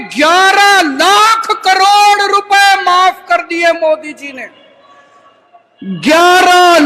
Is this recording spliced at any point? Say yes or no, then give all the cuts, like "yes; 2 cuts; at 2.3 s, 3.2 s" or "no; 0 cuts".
no; 0 cuts